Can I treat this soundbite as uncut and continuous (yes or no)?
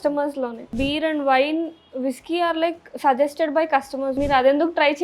no